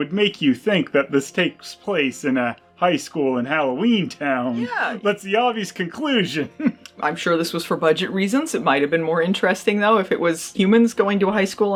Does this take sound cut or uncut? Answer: uncut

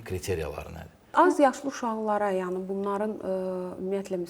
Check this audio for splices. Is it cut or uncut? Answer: cut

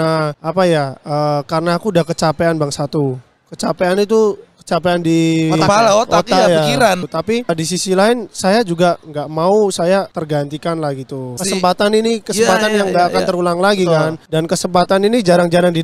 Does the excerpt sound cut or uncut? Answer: uncut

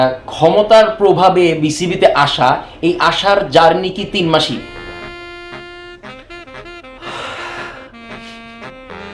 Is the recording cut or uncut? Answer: uncut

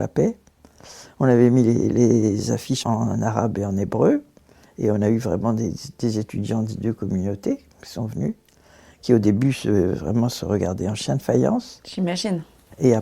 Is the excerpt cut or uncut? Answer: uncut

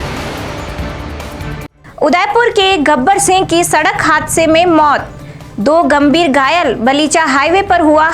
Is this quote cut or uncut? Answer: cut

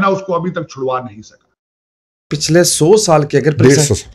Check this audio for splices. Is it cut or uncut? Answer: cut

